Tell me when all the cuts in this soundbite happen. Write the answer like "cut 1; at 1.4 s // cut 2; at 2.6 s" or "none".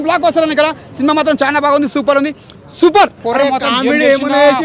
cut 1; at 3.2 s